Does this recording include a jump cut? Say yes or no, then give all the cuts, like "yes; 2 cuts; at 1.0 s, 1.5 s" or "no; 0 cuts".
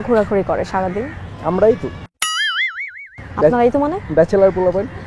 no; 0 cuts